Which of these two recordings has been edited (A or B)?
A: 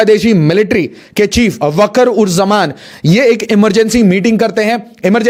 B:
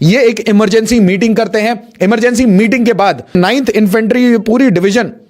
B